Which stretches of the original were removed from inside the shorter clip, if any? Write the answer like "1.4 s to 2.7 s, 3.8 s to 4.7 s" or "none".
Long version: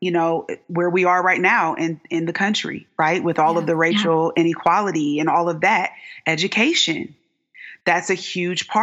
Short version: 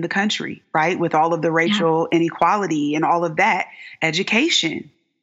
none